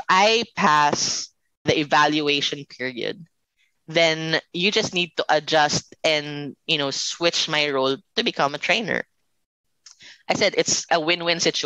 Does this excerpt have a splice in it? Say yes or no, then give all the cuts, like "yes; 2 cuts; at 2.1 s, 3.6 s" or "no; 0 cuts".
yes; 2 cuts; at 1.7 s, 10.5 s